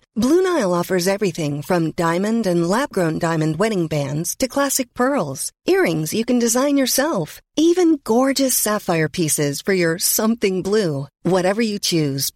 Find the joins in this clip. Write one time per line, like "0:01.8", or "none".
none